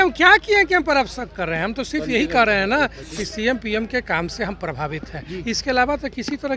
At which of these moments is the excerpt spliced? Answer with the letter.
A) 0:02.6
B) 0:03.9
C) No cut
C